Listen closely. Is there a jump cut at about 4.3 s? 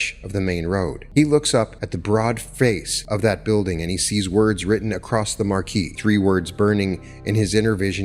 no; 4 cuts; at 1.0 s, 1.9 s, 2.9 s, 5.9 s

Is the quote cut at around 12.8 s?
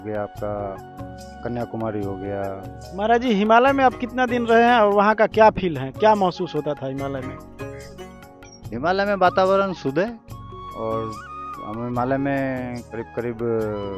yes; 3 cuts; at 7.3 s, 8.7 s, 12.8 s

